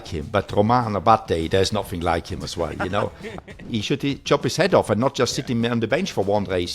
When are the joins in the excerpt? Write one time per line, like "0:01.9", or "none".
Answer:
0:03.6